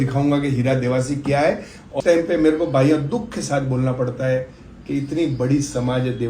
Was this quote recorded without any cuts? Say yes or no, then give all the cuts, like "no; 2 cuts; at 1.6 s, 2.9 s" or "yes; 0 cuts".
no; 1 cut; at 1.9 s